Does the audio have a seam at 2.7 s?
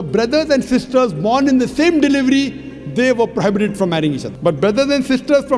no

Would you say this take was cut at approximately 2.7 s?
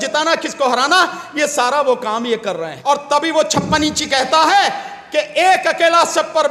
yes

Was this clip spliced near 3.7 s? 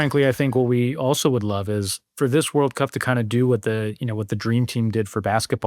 no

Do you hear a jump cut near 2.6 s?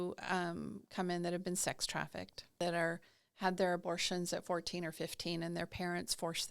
yes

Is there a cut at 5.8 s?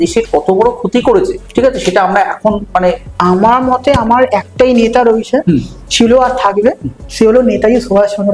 no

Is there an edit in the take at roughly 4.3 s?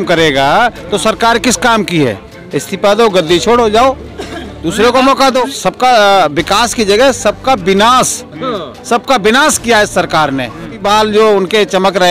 no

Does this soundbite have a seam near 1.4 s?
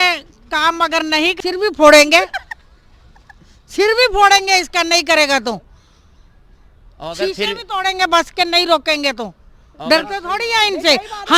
yes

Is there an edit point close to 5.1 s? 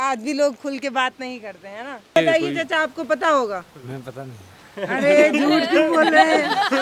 no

